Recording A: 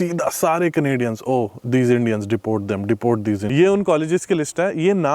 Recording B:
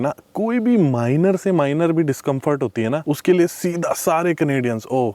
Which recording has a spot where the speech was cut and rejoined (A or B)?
A